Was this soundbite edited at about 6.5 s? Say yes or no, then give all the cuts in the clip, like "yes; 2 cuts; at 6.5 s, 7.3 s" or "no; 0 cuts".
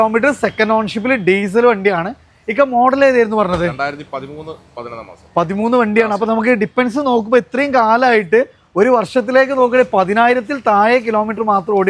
no; 0 cuts